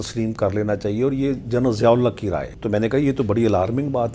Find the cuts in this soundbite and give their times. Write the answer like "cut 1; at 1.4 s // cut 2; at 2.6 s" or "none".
cut 1; at 2.5 s